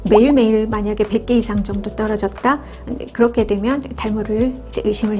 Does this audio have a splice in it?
no; 0 cuts

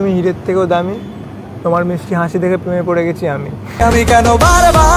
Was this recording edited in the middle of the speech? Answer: no; 0 cuts

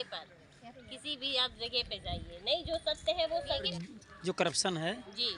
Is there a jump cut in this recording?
yes; 1 cut; at 3.7 s

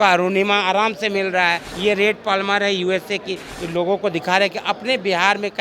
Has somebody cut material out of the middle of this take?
yes; 2 cuts; at 1.7 s, 3.5 s

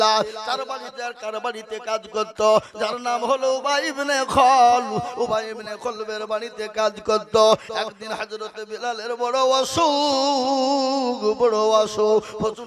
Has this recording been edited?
no; 0 cuts

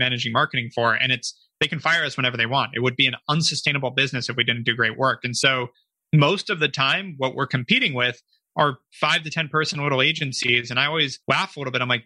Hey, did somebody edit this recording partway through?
yes; 1 cut; at 11.2 s

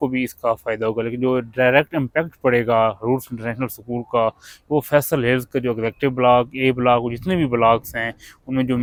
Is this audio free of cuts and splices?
yes; 0 cuts

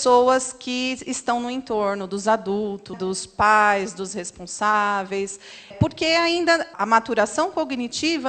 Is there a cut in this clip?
yes; 3 cuts; at 2.9 s, 5.7 s, 6.7 s

